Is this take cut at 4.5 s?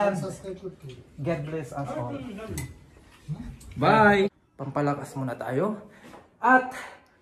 yes; 1 cut; at 4.5 s

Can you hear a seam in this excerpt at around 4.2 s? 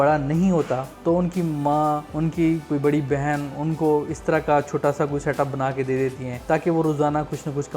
no; 3 cuts; at 0.9 s, 2.1 s, 6.3 s

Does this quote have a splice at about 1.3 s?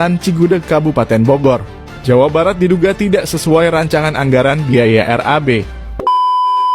no; 1 cut; at 5.8 s

